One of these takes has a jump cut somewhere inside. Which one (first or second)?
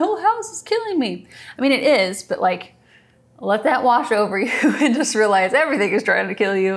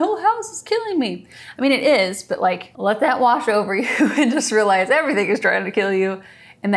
second